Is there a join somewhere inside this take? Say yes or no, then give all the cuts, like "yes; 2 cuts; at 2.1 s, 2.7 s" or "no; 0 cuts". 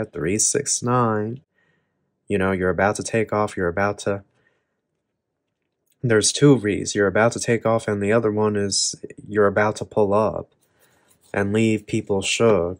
no; 0 cuts